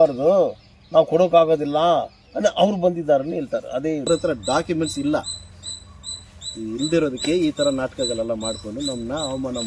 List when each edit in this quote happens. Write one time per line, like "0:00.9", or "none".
0:04.1